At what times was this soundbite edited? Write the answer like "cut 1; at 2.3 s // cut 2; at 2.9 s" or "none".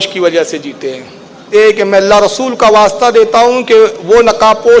cut 1; at 1.5 s